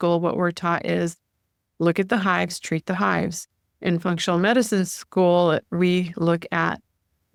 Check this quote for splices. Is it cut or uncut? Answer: uncut